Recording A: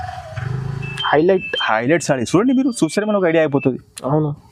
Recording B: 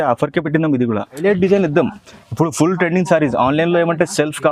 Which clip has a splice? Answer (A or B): B